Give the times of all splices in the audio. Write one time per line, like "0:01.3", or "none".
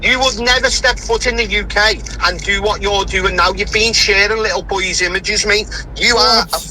0:04.7